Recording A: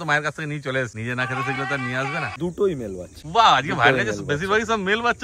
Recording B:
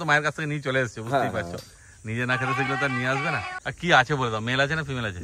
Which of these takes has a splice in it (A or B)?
A